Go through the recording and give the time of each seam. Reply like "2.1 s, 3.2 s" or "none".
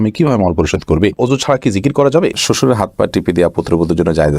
1.1 s, 2.3 s